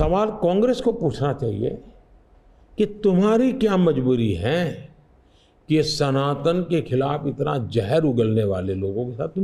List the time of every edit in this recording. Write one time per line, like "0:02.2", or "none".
none